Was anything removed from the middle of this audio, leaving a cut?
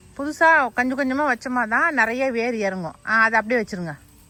no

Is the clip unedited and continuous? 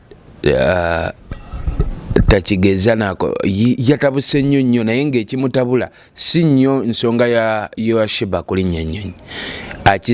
yes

